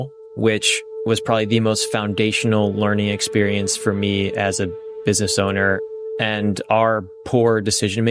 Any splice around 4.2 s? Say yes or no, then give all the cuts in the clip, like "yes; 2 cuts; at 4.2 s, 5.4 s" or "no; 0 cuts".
no; 1 cut; at 5.8 s